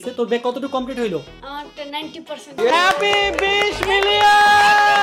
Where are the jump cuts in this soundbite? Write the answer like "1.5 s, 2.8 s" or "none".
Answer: 2.5 s